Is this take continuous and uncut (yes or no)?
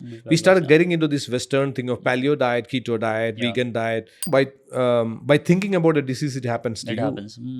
no